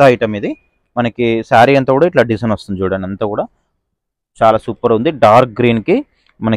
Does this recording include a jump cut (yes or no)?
no